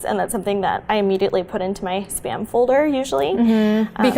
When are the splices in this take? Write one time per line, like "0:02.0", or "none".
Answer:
none